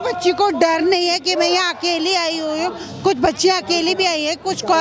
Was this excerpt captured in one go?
yes; 0 cuts

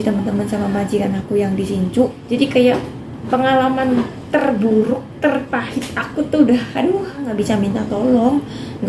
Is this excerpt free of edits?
no; 2 cuts; at 2.2 s, 7.2 s

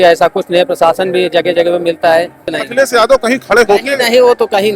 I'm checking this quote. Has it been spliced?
yes; 1 cut; at 2.5 s

